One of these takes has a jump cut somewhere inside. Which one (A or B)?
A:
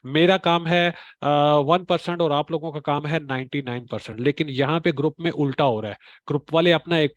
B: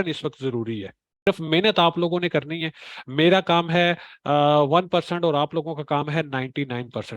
B